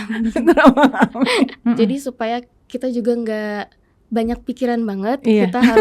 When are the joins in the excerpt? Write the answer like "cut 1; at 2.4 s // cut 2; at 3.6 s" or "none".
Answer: cut 1; at 1.6 s